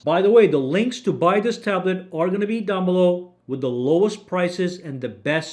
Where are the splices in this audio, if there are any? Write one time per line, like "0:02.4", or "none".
none